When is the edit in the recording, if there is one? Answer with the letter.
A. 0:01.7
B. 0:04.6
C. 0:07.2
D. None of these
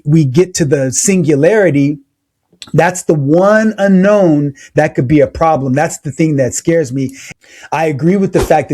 C